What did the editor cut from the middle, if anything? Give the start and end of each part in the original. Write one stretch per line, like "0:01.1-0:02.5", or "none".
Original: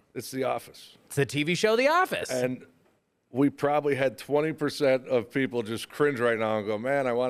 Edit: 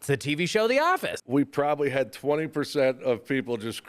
0:02.2-0:03.2

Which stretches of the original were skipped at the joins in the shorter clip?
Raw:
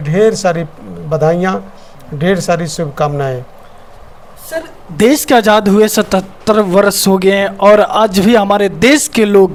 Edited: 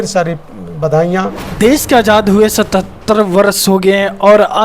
0:01.7-0:04.8

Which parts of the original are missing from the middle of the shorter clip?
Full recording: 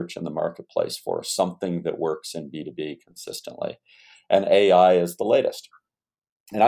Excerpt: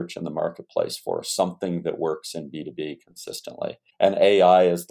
0:03.8-0:04.1

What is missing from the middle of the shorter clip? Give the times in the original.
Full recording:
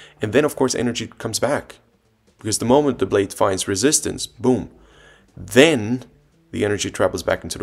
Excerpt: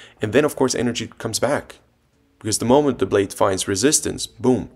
none

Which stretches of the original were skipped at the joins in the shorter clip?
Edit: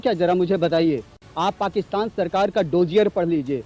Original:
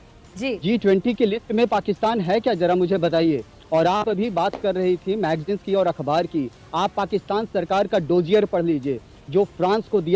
0:03.6-0:06.5

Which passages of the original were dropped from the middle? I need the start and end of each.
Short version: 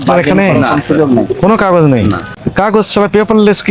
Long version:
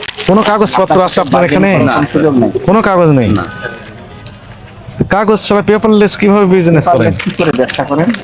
0:03.6-0:04.9

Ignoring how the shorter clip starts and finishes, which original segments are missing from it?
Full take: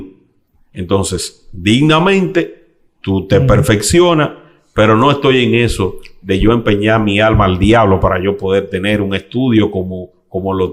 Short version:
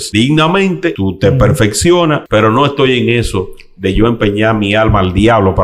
0:02.5-0:03.1
0:04.3-0:04.7

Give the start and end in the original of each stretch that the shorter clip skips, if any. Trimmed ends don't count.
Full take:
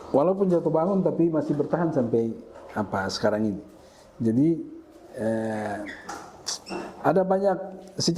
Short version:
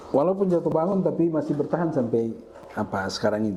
none

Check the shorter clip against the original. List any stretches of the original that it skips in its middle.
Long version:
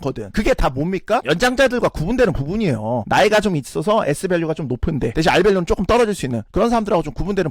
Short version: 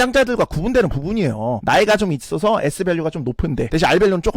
none

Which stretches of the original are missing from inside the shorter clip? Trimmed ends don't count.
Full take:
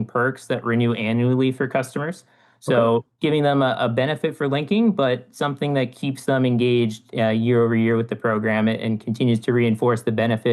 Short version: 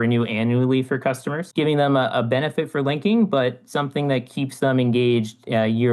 0:02.1-0:03.1

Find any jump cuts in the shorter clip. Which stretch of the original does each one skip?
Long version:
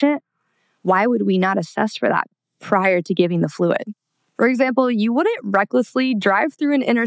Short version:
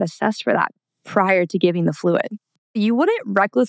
0:04.3-0:04.9

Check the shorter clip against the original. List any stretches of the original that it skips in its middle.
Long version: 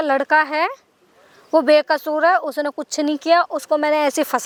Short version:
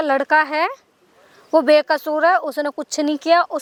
none

